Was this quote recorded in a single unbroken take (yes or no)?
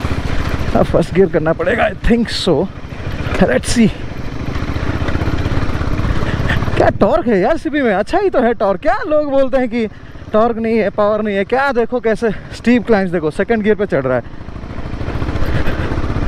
yes